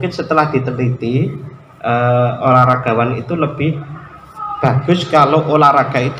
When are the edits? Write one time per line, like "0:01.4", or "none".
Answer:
none